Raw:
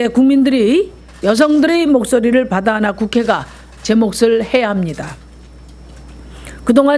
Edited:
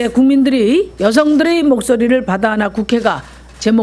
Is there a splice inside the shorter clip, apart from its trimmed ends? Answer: yes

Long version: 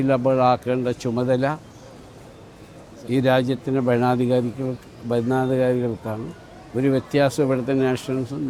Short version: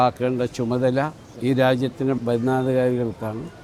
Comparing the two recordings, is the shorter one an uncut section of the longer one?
no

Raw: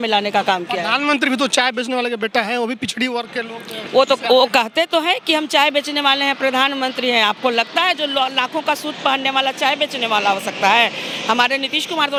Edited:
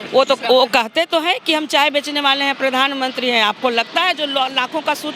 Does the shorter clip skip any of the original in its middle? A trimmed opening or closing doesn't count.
no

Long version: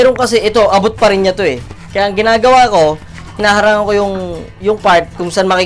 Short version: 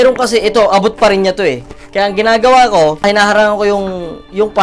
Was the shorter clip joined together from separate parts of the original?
yes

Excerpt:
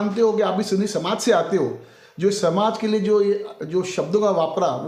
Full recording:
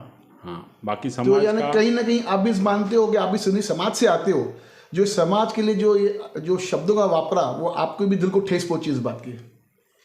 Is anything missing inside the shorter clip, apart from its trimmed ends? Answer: no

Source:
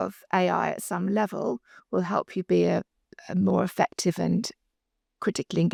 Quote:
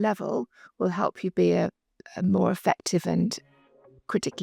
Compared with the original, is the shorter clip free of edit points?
yes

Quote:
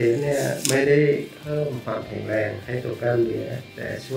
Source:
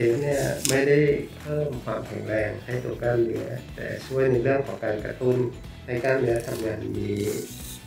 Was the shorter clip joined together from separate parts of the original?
no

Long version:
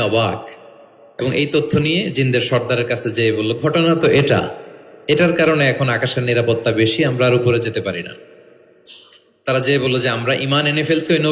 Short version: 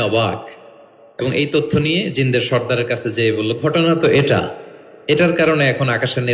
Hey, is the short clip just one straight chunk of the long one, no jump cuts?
yes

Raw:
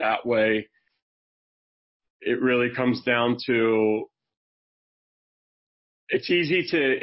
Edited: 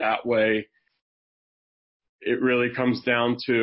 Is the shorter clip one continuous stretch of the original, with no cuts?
yes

